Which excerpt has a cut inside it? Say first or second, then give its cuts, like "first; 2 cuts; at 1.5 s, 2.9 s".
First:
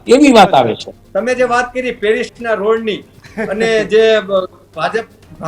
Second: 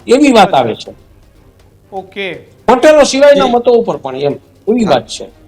first; 1 cut; at 0.9 s